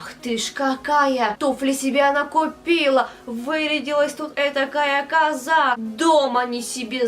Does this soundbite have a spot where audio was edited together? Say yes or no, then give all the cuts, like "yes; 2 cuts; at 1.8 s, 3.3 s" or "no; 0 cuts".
yes; 2 cuts; at 1.4 s, 5.9 s